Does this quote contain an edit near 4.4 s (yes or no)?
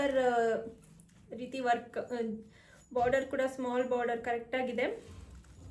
no